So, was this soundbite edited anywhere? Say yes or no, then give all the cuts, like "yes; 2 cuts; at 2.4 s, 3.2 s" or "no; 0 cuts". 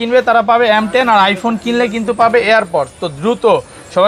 no; 0 cuts